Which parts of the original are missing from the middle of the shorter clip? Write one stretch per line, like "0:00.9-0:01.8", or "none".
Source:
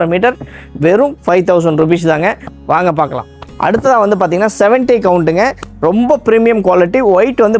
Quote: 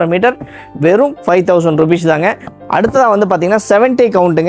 0:02.5-0:03.4